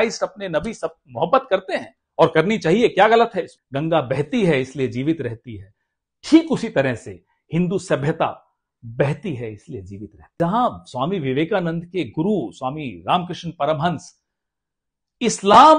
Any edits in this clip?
yes; 2 cuts; at 3.6 s, 10.4 s

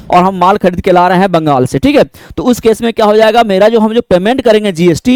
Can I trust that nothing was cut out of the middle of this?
yes; 0 cuts

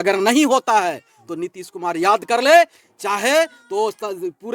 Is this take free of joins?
yes; 0 cuts

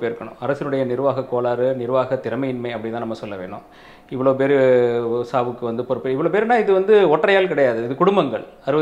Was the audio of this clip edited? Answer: no; 0 cuts

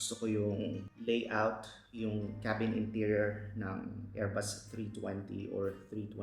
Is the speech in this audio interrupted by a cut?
yes; 1 cut; at 0.9 s

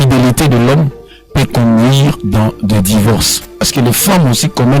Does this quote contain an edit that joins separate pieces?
yes; 1 cut; at 3.6 s

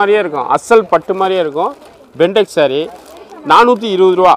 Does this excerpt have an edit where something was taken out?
yes; 1 cut; at 3.2 s

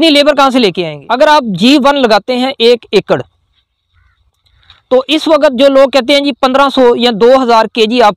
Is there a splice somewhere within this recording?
yes; 1 cut; at 0.9 s

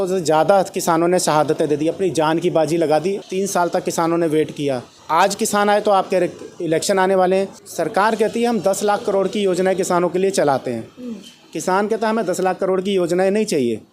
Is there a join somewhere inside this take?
yes; 3 cuts; at 3.2 s, 4.9 s, 7.6 s

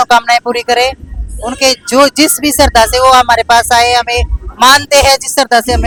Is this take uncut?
yes; 0 cuts

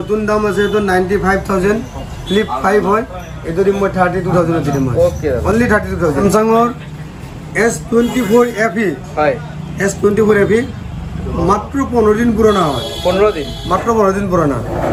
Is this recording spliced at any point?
no; 0 cuts

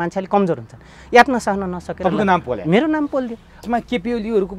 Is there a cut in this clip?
yes; 1 cut; at 3.5 s

